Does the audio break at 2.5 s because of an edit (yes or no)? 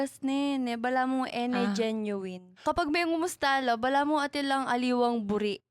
yes